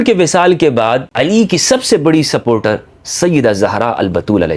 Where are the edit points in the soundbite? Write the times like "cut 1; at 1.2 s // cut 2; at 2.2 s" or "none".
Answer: cut 1; at 1.1 s